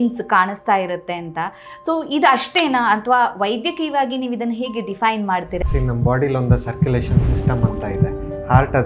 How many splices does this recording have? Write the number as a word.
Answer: one